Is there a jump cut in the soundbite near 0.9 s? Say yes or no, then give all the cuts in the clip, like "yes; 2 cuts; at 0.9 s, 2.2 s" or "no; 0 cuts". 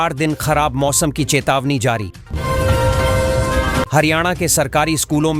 no; 2 cuts; at 2.2 s, 3.9 s